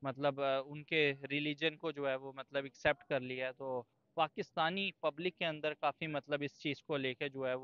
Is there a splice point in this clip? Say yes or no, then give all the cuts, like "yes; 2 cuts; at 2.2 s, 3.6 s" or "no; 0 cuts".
no; 0 cuts